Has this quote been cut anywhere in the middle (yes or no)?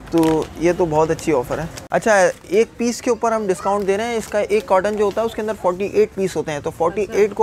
yes